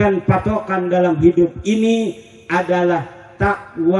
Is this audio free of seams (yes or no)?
yes